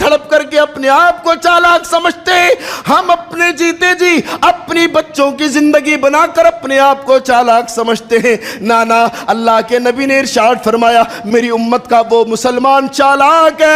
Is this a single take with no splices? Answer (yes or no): no